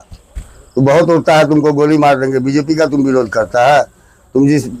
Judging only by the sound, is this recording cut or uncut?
uncut